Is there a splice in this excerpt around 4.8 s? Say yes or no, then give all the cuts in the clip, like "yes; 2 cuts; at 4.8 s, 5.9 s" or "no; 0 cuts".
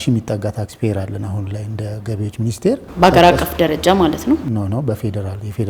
no; 1 cut; at 2.9 s